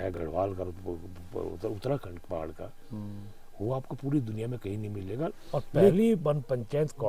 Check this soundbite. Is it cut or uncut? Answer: cut